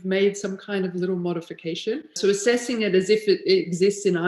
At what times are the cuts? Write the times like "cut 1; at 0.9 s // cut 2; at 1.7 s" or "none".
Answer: cut 1; at 2.1 s